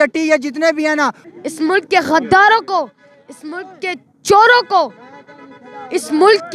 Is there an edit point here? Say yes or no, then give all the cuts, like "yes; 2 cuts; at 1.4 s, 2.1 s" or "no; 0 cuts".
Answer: yes; 1 cut; at 1.2 s